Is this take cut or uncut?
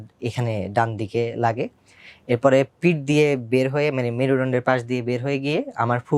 uncut